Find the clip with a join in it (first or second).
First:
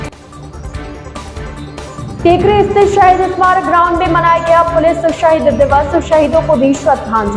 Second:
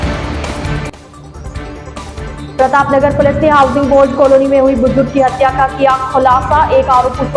second